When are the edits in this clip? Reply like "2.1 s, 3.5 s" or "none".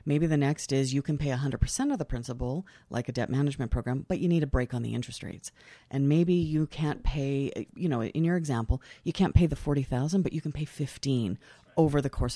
7.7 s